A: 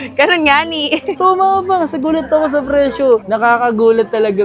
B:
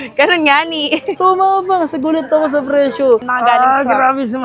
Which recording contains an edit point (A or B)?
B